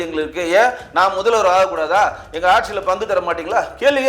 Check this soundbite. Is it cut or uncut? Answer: uncut